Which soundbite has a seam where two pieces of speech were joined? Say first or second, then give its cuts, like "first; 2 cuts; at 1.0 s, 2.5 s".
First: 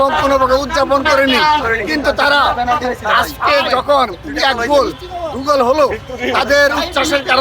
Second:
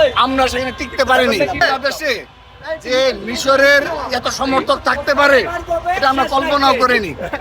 second; 1 cut; at 1.6 s